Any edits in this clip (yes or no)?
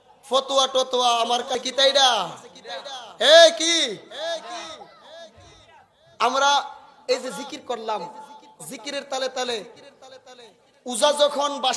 yes